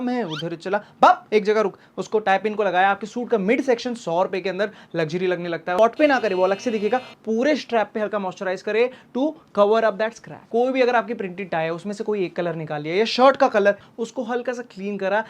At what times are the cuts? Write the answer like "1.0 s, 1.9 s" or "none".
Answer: 5.8 s, 10.4 s, 13.8 s